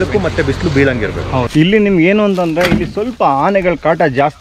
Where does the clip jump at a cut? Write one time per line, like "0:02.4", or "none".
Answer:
0:01.5